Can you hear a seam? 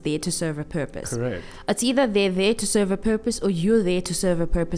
no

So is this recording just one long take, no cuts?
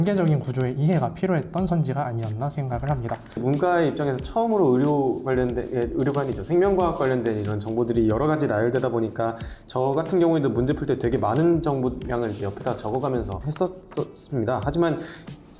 no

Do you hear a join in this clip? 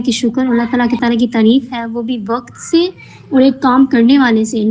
yes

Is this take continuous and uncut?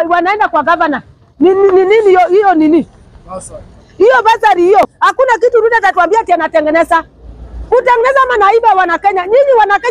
no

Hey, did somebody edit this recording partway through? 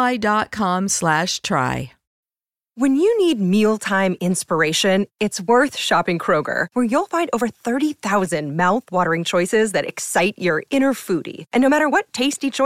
yes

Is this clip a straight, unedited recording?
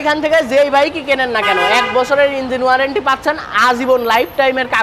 yes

